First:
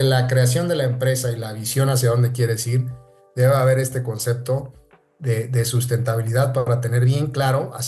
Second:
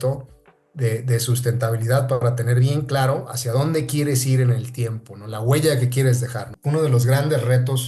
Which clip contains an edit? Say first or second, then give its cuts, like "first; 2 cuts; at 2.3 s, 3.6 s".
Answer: second; 1 cut; at 6.5 s